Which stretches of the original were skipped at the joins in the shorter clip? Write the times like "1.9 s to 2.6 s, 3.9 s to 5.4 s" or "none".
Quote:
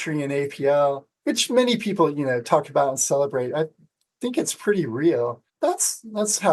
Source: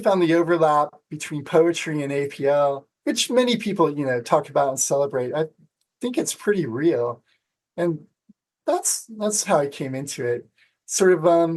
7.2 s to 8.5 s